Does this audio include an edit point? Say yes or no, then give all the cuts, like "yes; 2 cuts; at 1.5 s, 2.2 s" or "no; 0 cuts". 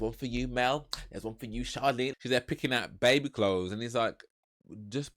yes; 1 cut; at 2.1 s